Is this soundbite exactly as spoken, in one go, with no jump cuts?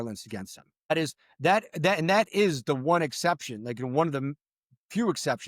no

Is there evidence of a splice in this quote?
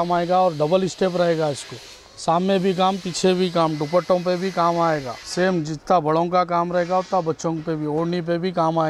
yes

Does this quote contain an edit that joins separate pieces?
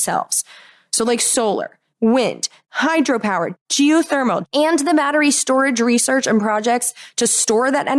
yes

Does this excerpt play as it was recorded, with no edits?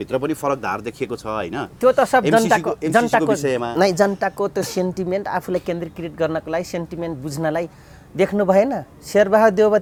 yes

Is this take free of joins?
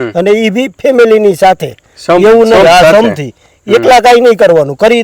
yes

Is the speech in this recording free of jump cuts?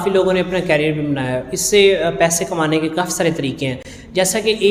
yes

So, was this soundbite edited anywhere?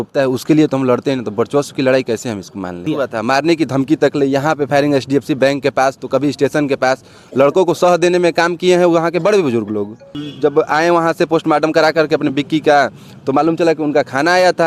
yes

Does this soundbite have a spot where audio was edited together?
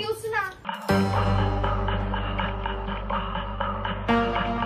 no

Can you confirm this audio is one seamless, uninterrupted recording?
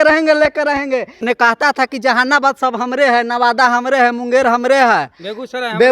no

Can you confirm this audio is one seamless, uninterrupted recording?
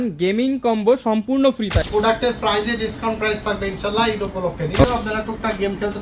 no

